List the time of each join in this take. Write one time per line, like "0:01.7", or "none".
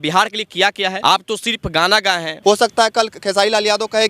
0:01.0
0:02.3

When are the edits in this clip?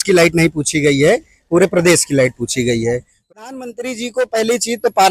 0:03.3

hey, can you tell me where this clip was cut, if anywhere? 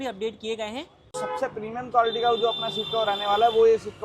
0:01.2

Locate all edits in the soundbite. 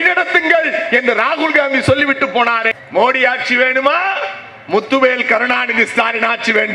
0:02.8

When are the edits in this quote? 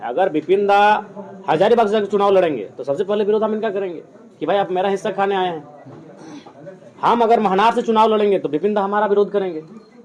none

